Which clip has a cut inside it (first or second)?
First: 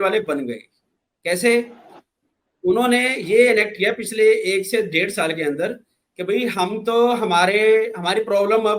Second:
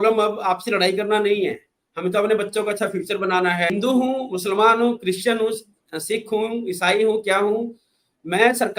second